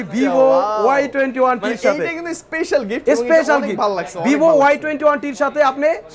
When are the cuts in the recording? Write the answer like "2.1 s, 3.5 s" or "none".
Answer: none